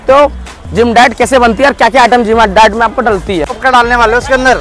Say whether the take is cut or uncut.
cut